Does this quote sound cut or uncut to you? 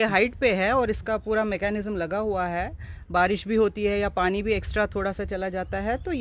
uncut